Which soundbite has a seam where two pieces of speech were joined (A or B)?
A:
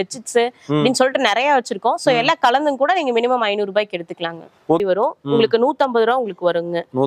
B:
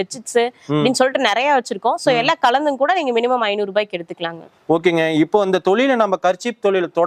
A